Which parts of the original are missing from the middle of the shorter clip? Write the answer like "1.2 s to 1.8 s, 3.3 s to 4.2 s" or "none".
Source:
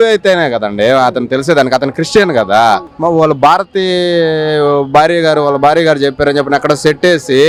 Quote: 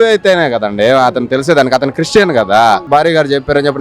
2.9 s to 5.6 s